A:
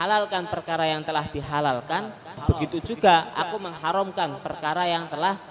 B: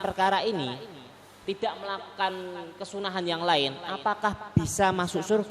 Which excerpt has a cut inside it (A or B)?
A